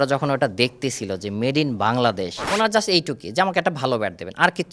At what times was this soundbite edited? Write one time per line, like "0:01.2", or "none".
0:02.4